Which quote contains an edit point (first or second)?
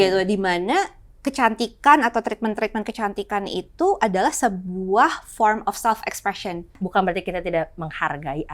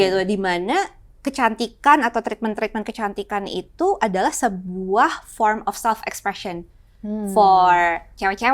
first